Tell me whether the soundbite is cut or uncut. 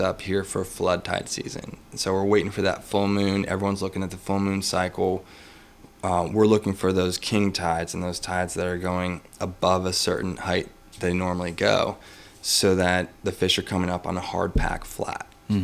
uncut